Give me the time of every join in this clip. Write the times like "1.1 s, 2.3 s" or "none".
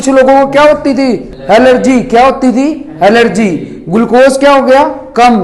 1.3 s

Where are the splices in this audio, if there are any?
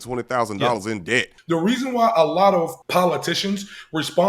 1.3 s, 2.8 s

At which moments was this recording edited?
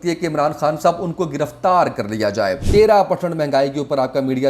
2.6 s

